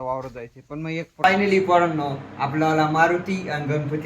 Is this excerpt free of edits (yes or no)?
no